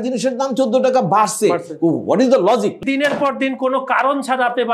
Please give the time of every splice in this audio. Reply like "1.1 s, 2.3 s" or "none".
2.8 s